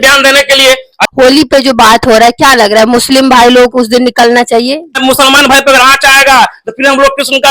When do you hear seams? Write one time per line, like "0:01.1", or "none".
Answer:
0:00.9
0:05.0